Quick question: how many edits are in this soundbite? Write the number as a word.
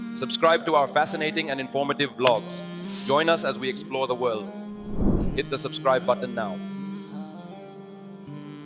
zero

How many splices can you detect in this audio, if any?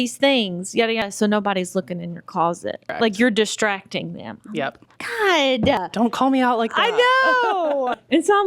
zero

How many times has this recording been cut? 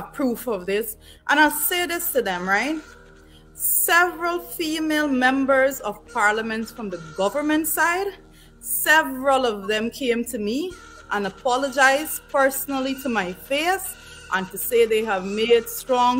zero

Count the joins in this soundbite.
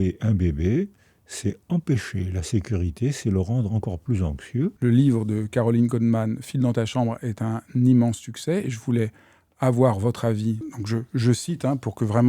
two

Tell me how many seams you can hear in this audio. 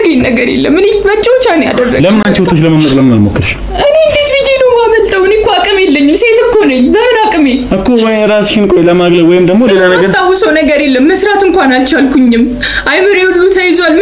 zero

